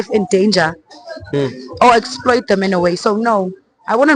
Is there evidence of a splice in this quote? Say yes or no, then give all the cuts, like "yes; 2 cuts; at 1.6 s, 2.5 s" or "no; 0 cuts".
no; 0 cuts